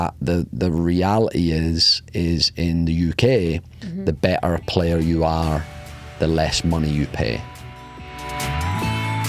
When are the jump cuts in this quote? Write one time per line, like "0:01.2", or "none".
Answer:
0:08.1